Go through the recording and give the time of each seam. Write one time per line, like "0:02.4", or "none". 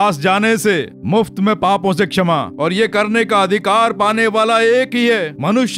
0:02.5